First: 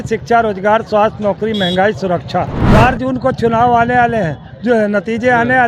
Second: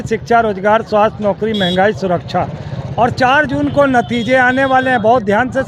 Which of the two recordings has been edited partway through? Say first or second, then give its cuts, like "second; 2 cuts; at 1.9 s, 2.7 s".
first; 1 cut; at 2.6 s